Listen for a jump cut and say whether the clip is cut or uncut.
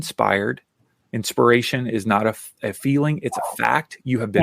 cut